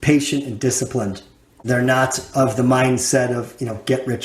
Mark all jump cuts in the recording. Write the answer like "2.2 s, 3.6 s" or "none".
none